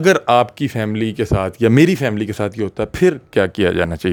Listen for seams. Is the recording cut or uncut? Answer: uncut